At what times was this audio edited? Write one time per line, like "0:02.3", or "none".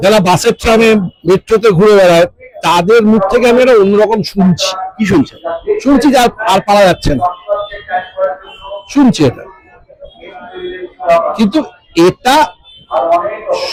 none

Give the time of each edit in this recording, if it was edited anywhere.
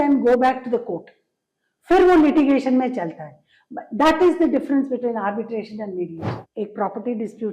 0:06.4

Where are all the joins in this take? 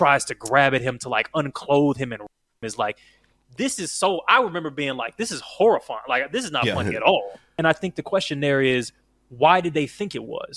0:07.4

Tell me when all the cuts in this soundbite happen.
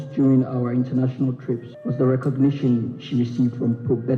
0:01.8

